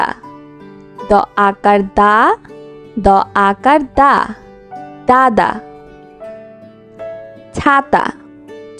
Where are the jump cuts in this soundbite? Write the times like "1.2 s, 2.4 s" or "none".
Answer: 5.6 s, 7.1 s